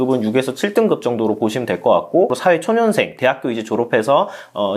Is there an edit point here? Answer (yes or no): yes